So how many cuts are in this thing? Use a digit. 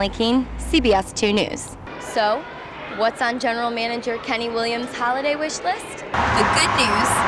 2